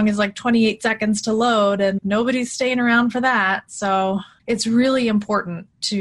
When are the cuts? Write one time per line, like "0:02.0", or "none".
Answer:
0:04.3